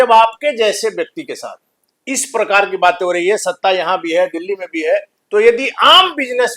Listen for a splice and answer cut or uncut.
uncut